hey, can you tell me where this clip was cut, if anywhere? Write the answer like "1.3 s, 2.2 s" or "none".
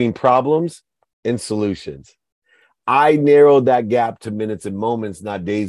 none